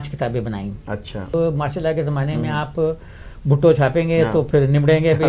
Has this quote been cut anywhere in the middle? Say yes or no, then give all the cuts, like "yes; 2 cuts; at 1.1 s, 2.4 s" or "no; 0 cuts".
yes; 1 cut; at 1.3 s